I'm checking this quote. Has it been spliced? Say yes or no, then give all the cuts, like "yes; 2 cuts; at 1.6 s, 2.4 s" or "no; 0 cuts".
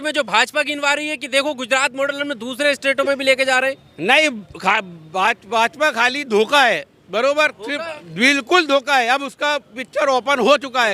no; 0 cuts